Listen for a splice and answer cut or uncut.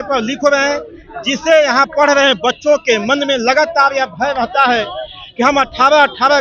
uncut